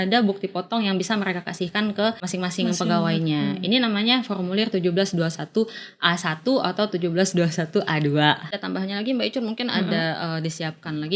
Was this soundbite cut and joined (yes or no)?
yes